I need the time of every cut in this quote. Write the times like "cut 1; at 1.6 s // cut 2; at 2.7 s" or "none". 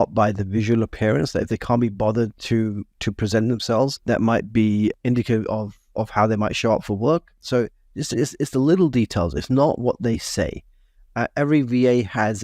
cut 1; at 4.0 s // cut 2; at 5.0 s // cut 3; at 7.4 s